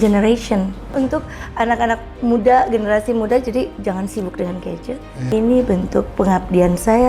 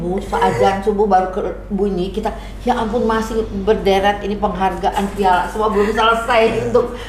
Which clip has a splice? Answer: first; 2 cuts; at 0.9 s, 5.1 s

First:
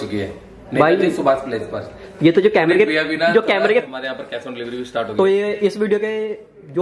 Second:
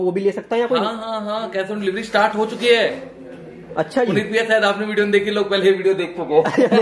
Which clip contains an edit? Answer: first; 1 cut; at 3.9 s

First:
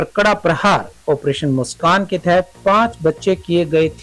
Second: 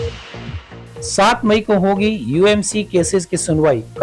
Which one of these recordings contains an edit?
second; 1 cut; at 1.1 s

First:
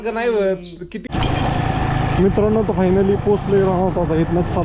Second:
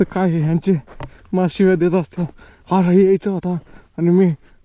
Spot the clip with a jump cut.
first; 1 cut; at 1.1 s

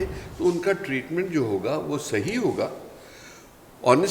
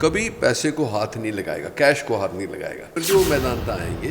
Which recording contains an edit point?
second; 1 cut; at 3.0 s

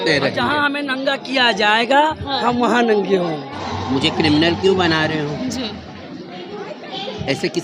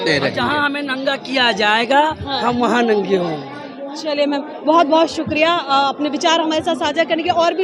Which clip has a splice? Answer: first; 1 cut; at 3.7 s

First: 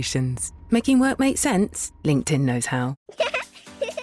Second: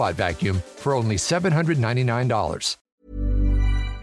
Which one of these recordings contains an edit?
first; 1 cut; at 3.0 s

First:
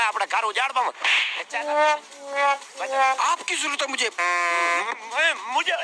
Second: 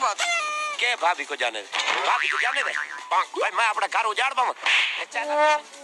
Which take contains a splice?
first; 1 cut; at 3.2 s

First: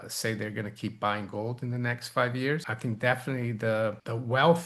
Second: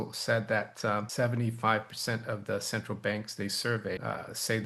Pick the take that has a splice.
first; 1 cut; at 2.7 s

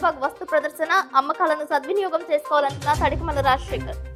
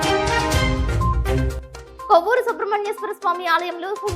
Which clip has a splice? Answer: second; 1 cut; at 2.0 s

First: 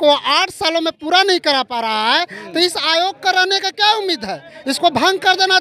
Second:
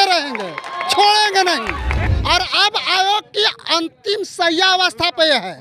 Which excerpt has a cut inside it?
second; 1 cut; at 2.0 s

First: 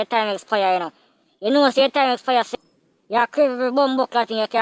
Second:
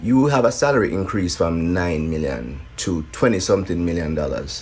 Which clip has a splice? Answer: first; 1 cut; at 2.5 s

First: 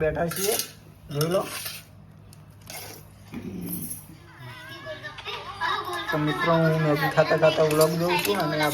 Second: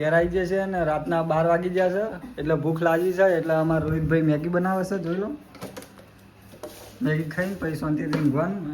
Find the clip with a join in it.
first; 1 cut; at 4.6 s

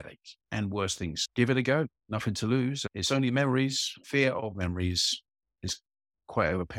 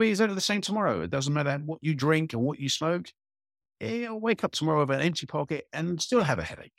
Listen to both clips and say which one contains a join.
first; 3 cuts; at 1.2 s, 2.9 s, 3.9 s

